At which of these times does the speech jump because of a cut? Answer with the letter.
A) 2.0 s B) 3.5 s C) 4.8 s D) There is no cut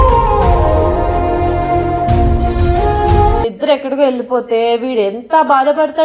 B